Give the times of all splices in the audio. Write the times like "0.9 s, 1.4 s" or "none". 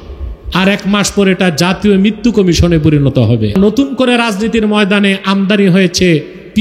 3.5 s